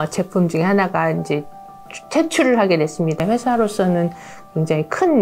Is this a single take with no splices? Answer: no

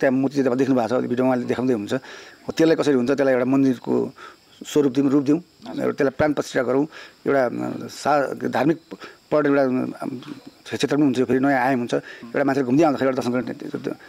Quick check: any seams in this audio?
no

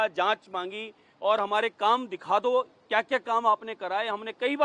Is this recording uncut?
yes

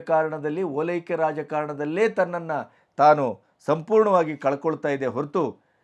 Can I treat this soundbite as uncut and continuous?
yes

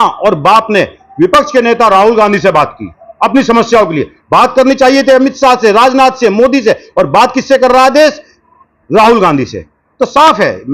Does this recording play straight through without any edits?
yes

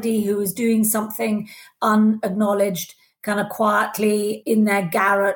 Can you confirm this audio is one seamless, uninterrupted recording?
no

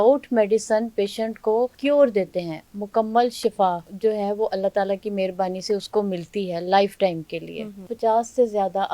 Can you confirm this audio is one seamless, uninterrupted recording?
no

